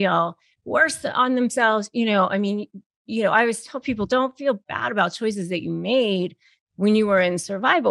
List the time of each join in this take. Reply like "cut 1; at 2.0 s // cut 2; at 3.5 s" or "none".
none